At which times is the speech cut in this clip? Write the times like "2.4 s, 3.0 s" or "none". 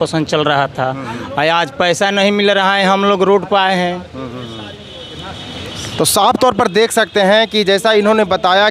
none